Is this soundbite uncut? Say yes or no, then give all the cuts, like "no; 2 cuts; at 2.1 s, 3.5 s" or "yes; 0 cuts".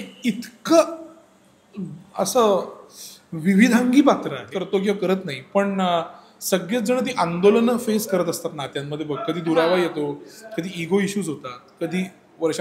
no; 1 cut; at 4.5 s